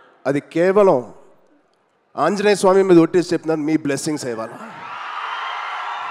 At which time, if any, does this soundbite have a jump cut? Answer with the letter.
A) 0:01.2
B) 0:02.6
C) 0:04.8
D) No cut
D